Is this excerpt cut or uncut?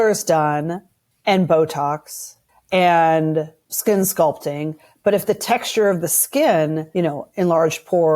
cut